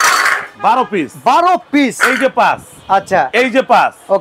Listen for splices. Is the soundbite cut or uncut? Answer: uncut